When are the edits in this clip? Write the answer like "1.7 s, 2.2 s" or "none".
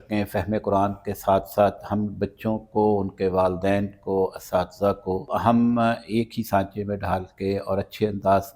5.3 s